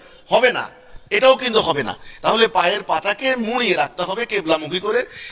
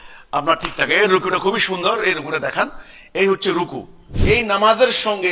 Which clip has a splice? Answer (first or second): second